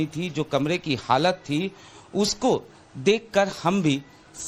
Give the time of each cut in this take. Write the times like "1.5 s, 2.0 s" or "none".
none